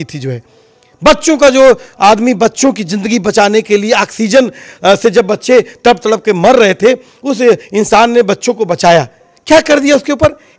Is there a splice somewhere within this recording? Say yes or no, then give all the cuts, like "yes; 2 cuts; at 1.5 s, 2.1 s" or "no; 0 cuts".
no; 0 cuts